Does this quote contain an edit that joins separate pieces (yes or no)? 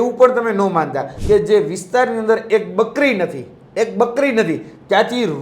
yes